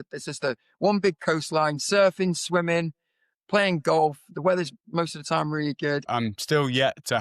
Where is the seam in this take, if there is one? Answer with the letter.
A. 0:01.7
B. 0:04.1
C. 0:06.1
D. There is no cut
C